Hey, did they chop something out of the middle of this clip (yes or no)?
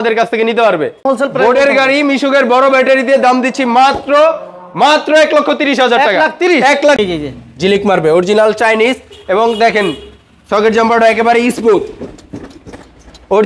yes